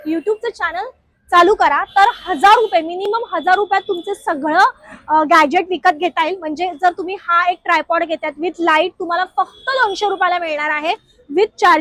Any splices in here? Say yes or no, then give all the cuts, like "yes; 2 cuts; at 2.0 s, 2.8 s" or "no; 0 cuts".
no; 0 cuts